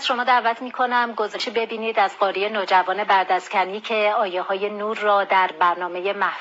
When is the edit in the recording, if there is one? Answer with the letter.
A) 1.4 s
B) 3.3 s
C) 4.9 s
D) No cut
A